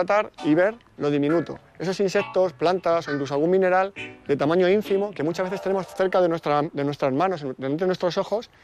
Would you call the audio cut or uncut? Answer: cut